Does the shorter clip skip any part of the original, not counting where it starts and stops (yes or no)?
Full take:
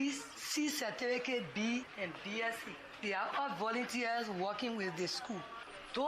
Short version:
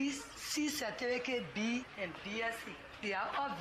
no